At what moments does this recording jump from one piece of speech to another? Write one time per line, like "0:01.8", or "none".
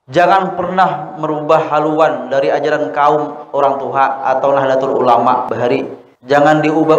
0:05.6